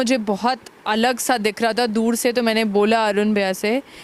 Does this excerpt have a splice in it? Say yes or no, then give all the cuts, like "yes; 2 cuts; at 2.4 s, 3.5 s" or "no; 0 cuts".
no; 0 cuts